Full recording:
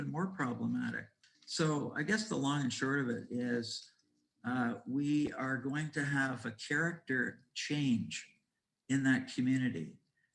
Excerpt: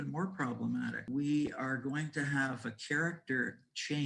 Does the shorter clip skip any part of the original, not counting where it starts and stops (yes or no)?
yes